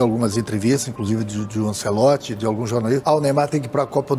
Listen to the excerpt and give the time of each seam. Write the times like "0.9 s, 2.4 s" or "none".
3.0 s